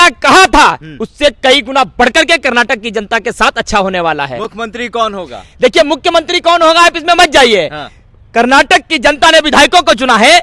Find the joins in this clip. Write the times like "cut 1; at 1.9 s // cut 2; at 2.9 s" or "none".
none